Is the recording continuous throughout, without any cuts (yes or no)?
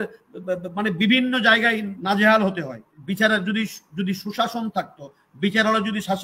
no